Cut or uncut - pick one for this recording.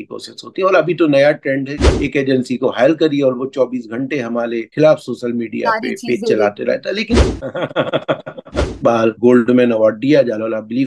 cut